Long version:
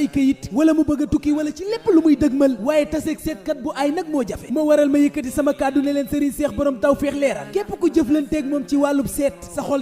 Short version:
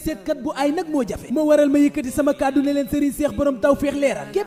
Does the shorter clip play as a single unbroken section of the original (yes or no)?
yes